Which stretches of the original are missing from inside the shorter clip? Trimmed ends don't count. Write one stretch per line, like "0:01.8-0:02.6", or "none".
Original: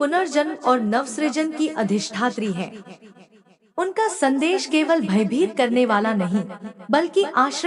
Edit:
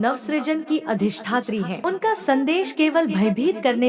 0:02.6-0:03.7